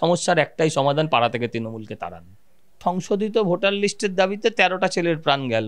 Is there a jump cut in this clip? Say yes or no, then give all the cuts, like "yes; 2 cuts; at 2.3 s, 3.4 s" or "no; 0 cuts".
yes; 1 cut; at 2.8 s